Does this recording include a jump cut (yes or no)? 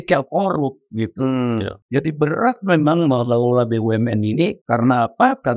yes